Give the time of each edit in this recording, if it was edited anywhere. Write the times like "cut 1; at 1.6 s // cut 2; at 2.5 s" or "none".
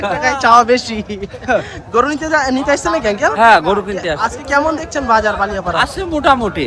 none